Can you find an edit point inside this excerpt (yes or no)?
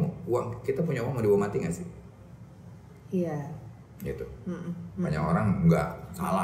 no